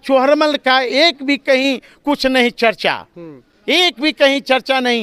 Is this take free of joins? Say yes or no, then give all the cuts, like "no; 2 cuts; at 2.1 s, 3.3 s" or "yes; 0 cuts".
yes; 0 cuts